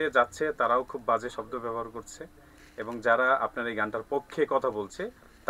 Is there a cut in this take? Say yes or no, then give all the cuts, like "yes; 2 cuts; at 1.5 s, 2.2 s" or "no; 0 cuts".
no; 0 cuts